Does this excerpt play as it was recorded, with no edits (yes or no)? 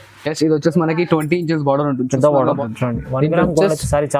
no